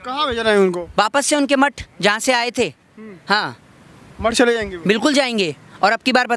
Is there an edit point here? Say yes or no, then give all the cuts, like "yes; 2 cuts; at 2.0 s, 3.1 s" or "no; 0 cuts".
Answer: no; 0 cuts